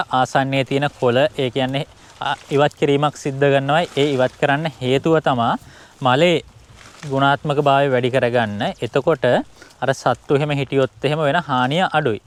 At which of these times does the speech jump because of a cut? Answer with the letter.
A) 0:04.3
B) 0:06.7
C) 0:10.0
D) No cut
D